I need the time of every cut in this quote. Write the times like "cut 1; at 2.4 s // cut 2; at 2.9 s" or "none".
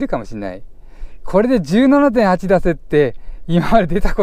none